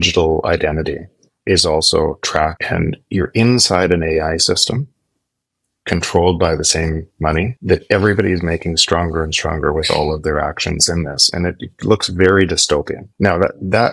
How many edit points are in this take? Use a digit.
2